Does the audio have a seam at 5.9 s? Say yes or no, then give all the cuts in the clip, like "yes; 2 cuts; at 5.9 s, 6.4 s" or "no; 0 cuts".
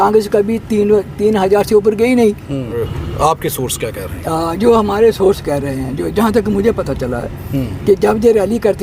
no; 1 cut; at 2.8 s